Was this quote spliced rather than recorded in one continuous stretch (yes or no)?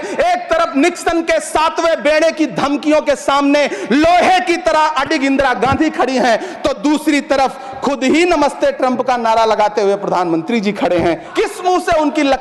yes